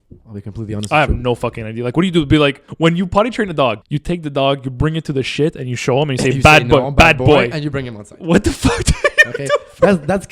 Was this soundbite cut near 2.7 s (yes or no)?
yes